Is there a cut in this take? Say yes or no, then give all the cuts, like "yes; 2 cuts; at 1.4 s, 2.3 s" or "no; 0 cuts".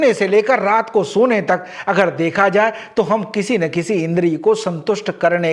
no; 0 cuts